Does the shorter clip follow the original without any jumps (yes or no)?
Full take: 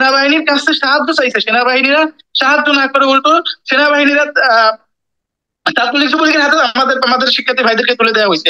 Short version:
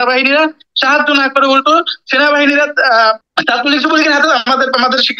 no